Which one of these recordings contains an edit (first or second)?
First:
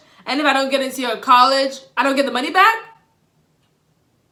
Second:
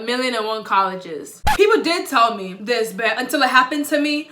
second